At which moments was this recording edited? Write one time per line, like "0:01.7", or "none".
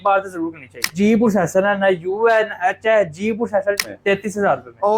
0:00.9
0:03.8

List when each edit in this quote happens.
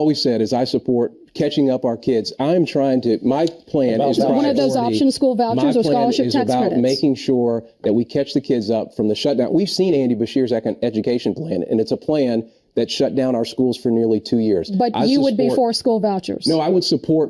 none

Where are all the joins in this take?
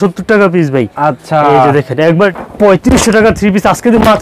0:02.3

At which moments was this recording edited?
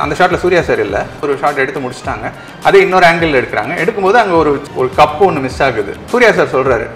0:01.2
0:06.1

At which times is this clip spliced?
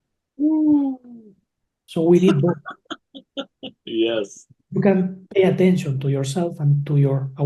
0:05.2

